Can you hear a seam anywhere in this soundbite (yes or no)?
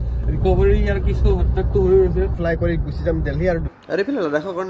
yes